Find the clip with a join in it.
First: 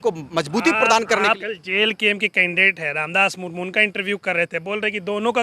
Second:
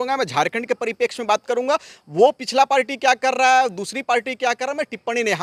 first; 1 cut; at 1.4 s

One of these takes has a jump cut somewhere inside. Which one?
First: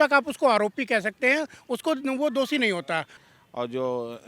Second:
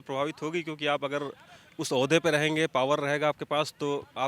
first; 1 cut; at 3.1 s

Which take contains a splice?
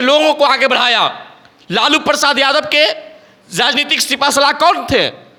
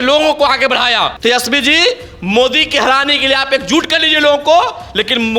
second; 1 cut; at 1.2 s

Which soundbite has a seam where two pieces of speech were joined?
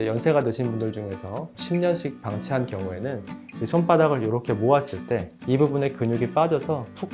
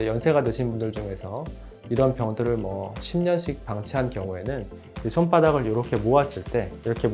first; 2 cuts; at 1.5 s, 5.3 s

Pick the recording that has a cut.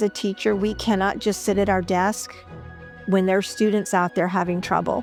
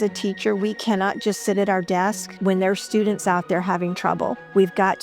second; 1 cut; at 2.3 s

